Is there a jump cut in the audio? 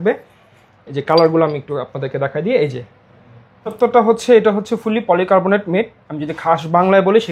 yes; 1 cut; at 3.8 s

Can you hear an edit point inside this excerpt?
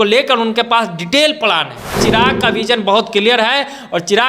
yes; 1 cut; at 2.0 s

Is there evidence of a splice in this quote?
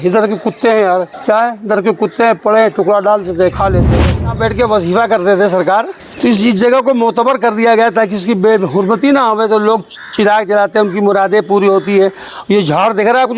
yes; 3 cuts; at 1.1 s, 3.9 s, 6.0 s

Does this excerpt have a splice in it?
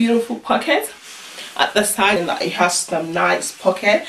yes; 1 cut; at 2.2 s

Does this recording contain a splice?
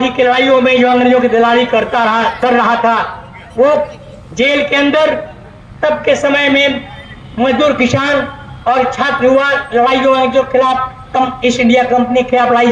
no; 0 cuts

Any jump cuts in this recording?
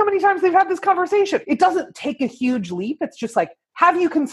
yes; 1 cut; at 1.4 s

